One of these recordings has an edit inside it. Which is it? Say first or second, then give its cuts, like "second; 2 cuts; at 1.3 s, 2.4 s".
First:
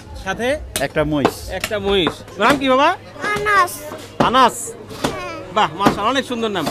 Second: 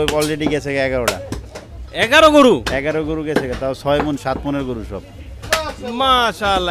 first; 2 cuts; at 2.2 s, 3.1 s